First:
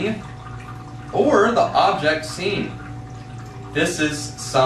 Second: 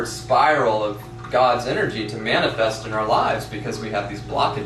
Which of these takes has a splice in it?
second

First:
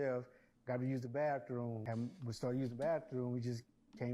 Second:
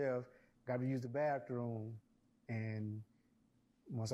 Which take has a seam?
first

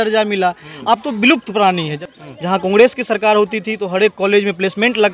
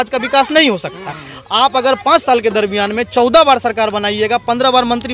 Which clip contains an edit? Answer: first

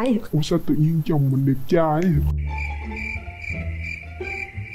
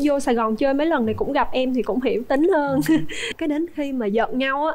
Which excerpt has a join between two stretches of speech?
second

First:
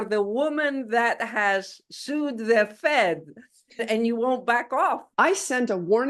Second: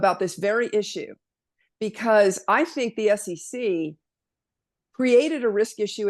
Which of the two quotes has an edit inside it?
first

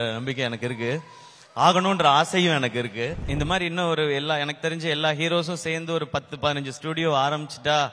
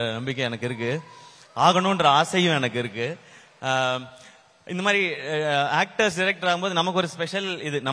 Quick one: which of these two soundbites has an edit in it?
first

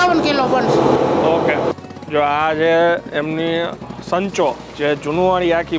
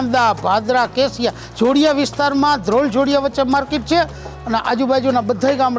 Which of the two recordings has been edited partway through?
first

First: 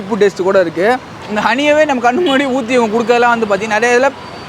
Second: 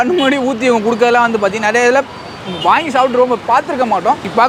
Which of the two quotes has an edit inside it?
first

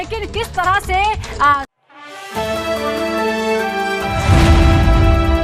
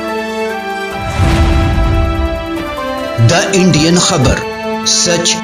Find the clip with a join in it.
first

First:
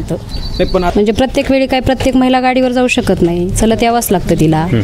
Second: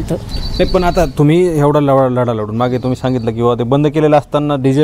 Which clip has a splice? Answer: first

